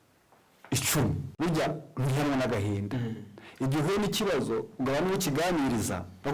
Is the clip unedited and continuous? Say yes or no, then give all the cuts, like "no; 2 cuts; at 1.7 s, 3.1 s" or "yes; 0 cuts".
no; 1 cut; at 1.3 s